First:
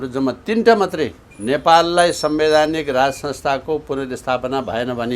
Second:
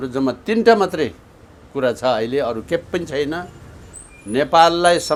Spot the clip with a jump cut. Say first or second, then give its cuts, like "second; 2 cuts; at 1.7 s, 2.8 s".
first; 1 cut; at 1.3 s